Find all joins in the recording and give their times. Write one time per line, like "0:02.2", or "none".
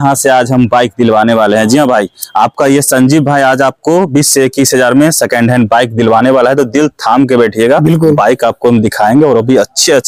none